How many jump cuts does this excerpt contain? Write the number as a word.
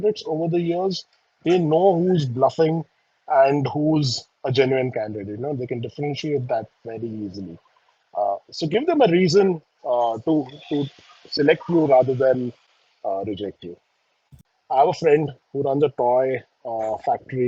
one